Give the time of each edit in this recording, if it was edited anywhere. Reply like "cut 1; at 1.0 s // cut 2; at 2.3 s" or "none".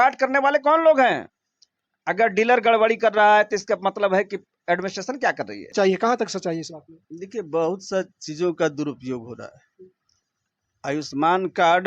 cut 1; at 5.7 s